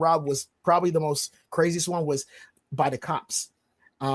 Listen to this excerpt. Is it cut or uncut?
uncut